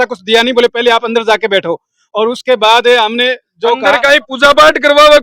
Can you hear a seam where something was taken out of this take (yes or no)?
no